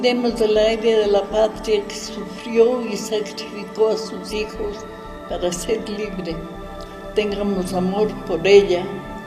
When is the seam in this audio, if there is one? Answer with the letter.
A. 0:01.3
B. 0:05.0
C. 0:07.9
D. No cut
D